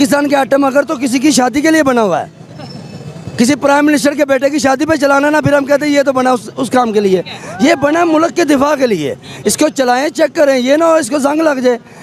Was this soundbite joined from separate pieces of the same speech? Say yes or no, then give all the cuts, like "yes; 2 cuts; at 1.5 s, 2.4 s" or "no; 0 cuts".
no; 0 cuts